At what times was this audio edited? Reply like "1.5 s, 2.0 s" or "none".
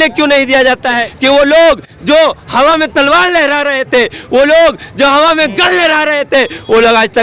1.1 s